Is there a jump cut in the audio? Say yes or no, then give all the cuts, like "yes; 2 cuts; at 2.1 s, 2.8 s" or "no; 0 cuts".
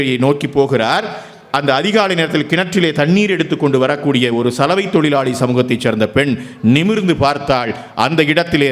no; 0 cuts